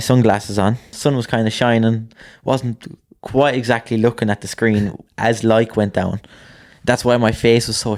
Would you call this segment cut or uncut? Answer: cut